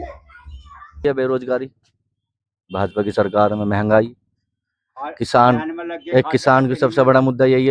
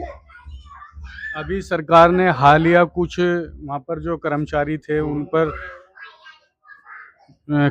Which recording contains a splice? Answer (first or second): first